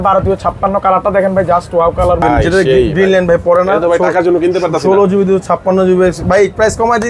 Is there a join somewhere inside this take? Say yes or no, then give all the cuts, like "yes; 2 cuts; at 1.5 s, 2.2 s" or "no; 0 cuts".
yes; 1 cut; at 2.2 s